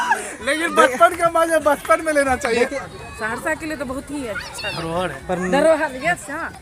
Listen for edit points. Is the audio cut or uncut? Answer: cut